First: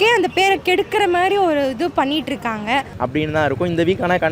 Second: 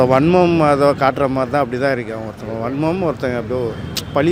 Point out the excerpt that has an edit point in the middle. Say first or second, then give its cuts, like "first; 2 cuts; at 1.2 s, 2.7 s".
first; 1 cut; at 2.9 s